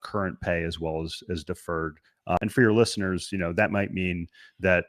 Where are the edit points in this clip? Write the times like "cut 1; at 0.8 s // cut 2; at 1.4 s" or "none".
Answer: cut 1; at 2.4 s